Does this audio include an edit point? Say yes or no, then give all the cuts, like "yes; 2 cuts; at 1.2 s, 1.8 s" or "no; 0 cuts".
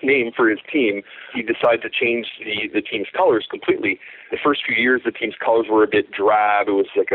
yes; 2 cuts; at 1.3 s, 4.3 s